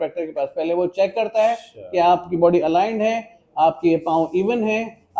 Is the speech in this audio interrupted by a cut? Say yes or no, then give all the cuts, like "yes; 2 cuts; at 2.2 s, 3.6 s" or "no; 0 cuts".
no; 0 cuts